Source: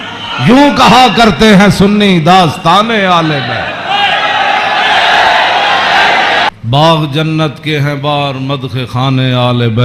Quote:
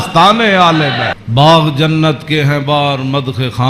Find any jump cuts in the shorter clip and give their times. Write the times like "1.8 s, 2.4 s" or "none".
1.2 s